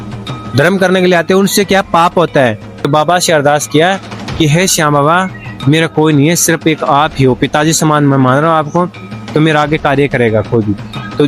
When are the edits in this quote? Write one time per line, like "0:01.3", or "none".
0:02.9